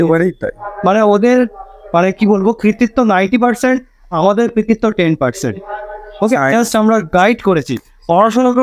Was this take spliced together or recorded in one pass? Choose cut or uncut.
uncut